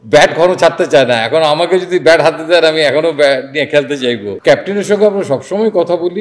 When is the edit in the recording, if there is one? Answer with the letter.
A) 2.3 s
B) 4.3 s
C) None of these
B